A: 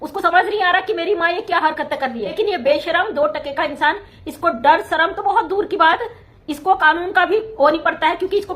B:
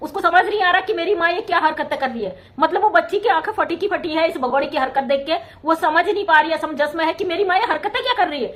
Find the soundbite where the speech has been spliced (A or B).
A